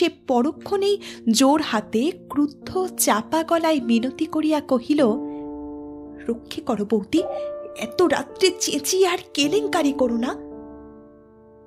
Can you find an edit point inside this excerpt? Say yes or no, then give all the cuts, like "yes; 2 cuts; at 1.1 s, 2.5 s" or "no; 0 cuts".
no; 0 cuts